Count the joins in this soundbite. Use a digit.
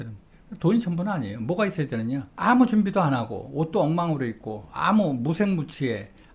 1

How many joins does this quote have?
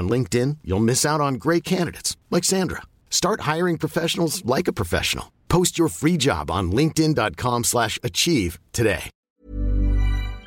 1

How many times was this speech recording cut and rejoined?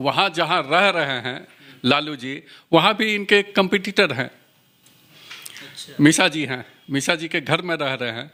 0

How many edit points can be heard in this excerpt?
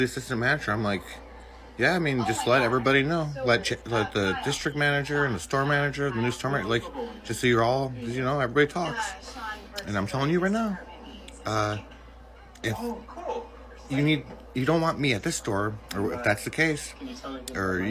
1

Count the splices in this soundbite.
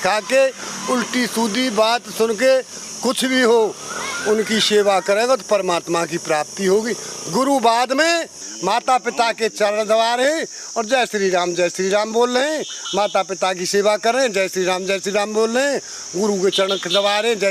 1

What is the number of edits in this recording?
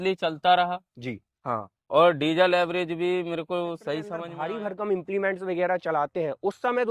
1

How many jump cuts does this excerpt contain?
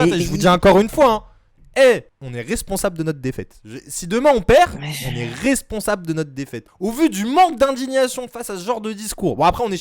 0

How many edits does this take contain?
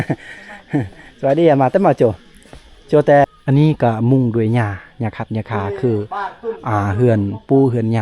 1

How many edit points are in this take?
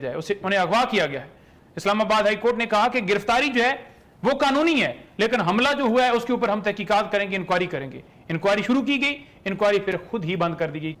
0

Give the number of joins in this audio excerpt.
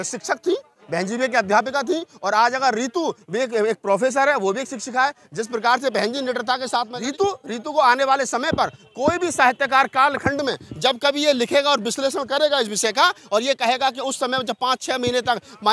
1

